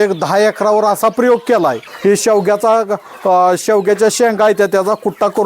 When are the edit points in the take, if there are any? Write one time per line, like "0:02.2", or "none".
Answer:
0:01.9